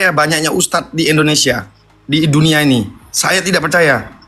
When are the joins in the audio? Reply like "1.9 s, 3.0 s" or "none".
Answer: none